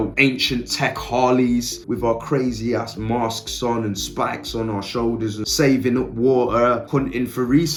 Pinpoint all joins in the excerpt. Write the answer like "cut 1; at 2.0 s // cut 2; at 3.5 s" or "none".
none